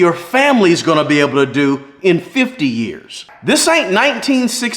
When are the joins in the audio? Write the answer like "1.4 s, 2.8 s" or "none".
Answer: 3.2 s